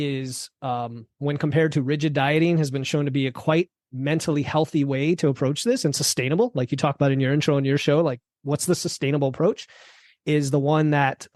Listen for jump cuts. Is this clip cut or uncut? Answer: uncut